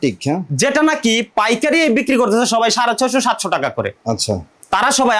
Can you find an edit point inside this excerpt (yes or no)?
no